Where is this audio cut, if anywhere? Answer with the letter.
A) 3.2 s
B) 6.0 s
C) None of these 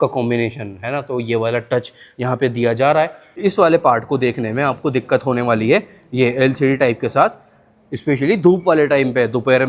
A